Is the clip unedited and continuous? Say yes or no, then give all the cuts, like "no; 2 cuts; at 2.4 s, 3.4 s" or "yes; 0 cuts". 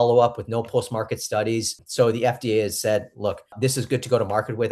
no; 2 cuts; at 1.8 s, 3.6 s